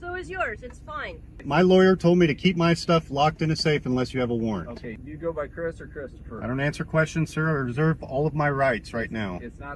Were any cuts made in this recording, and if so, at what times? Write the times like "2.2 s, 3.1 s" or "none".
1.3 s, 4.7 s